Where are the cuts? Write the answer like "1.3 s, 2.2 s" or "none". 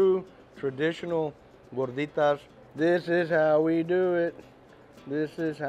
2.6 s